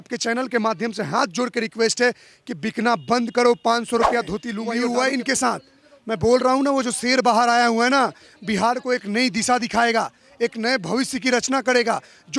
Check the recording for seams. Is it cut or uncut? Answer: cut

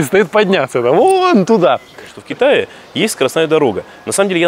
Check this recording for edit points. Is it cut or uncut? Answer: cut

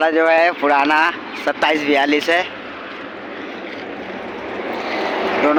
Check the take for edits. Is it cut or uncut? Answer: uncut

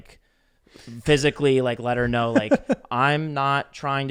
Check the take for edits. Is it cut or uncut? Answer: uncut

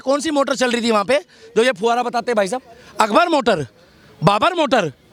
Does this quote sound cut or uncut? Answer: uncut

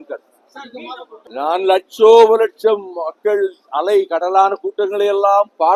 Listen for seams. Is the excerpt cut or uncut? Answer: uncut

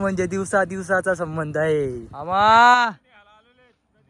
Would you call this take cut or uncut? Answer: cut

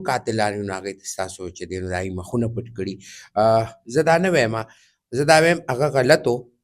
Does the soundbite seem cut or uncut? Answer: uncut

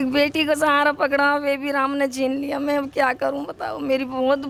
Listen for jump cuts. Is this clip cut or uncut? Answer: uncut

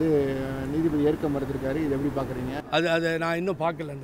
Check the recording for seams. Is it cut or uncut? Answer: cut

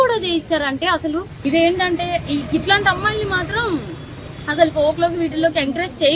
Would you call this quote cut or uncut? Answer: cut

